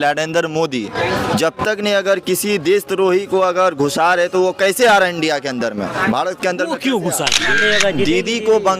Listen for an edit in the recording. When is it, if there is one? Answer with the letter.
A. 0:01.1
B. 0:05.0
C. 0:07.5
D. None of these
C